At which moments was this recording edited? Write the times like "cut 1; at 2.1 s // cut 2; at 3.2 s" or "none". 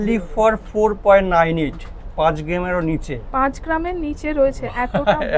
none